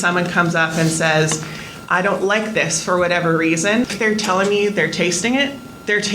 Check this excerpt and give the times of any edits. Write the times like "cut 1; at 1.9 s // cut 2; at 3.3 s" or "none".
cut 1; at 3.9 s